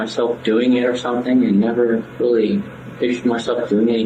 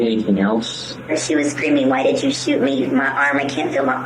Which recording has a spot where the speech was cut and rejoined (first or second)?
second